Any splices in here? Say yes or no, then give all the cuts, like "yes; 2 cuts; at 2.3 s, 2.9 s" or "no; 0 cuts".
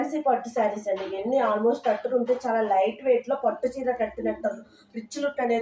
no; 0 cuts